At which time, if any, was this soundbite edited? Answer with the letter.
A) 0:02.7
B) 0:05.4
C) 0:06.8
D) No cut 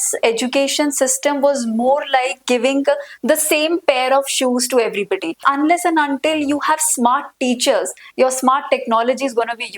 B